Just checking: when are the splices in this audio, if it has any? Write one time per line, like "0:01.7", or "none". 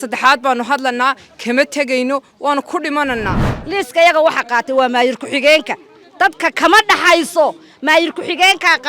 0:03.5

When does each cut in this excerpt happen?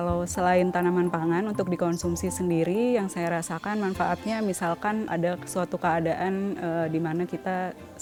none

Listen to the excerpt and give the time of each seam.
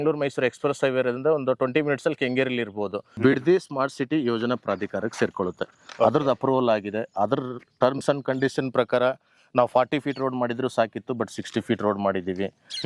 0:03.1

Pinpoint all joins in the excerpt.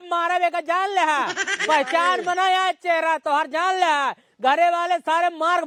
none

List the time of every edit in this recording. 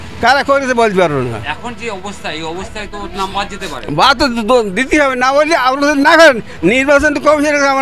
none

